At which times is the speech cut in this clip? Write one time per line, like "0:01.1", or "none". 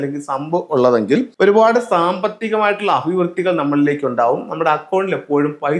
0:01.3